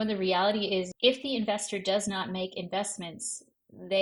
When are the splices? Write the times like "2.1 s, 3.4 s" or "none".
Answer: 0.9 s